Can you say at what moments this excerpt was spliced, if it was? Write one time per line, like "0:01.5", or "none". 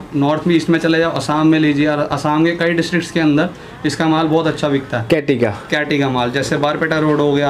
none